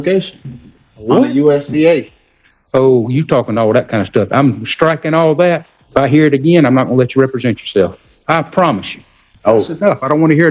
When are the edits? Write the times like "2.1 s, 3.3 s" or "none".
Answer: 5.8 s, 8.1 s, 9.1 s